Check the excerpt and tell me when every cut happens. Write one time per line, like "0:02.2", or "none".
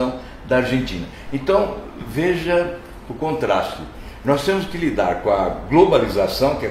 none